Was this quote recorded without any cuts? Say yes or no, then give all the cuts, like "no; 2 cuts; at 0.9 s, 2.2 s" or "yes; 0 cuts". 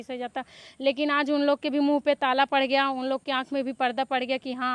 yes; 0 cuts